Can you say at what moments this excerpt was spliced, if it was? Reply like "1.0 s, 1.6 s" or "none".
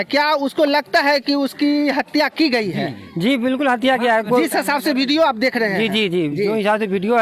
none